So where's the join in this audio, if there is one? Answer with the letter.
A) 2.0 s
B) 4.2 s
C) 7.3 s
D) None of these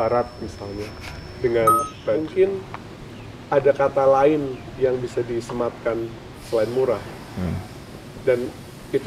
A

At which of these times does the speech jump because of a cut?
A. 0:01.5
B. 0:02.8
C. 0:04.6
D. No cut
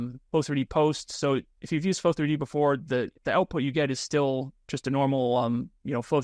A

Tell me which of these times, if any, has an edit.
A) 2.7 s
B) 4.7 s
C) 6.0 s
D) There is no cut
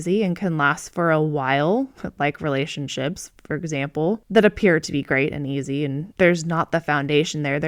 D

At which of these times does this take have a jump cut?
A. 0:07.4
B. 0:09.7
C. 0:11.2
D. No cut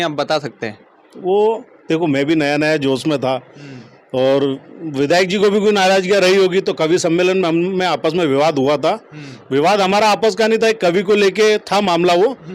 D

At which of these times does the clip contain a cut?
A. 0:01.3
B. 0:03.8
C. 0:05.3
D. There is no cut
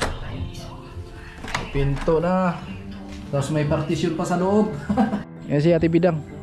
C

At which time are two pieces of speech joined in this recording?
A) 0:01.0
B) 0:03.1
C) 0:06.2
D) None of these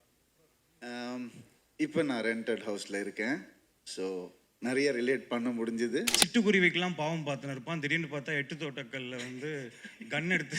C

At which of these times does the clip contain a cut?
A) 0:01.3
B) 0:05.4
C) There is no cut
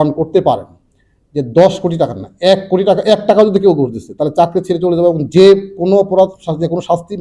C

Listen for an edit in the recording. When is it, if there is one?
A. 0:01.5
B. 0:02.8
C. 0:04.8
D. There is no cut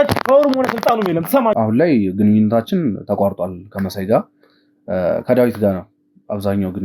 A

